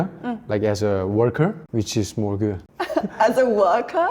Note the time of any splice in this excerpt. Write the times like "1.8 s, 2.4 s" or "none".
1.6 s, 2.7 s